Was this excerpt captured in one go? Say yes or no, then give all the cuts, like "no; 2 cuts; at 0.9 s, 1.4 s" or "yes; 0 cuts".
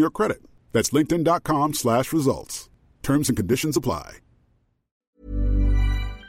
no; 1 cut; at 5.0 s